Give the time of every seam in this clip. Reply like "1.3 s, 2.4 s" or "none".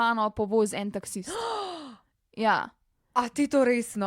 none